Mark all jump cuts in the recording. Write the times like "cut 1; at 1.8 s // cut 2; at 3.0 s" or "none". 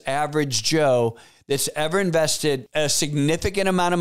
cut 1; at 2.6 s